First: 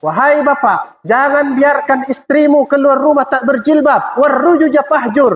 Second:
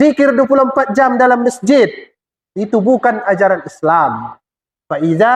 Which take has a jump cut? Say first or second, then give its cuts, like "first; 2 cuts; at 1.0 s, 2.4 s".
first; 1 cut; at 0.9 s